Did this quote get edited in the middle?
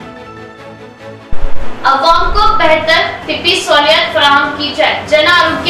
yes; 1 cut; at 1.1 s

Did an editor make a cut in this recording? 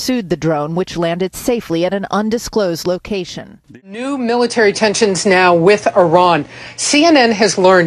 yes; 1 cut; at 3.7 s

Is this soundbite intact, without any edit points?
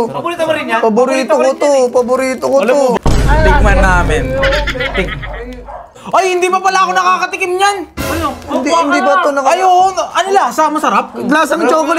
no; 2 cuts; at 3.0 s, 6.0 s

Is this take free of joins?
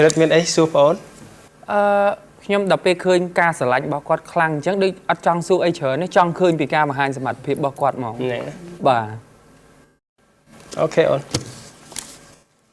yes; 0 cuts

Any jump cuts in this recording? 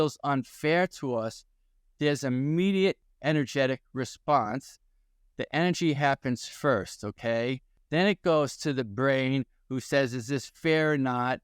yes; 2 cuts; at 3.1 s, 7.7 s

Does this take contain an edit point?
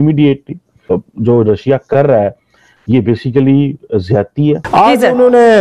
yes; 2 cuts; at 0.9 s, 4.6 s

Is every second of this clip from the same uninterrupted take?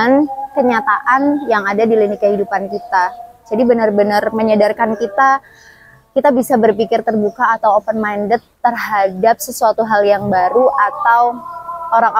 yes; 0 cuts

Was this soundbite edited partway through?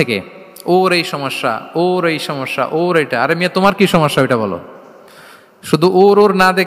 no; 0 cuts

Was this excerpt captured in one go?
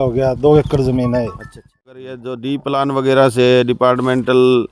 no; 1 cut; at 1.9 s

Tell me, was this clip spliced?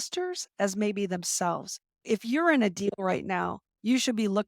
yes; 1 cut; at 2.0 s

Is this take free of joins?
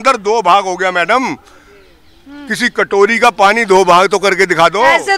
yes; 0 cuts

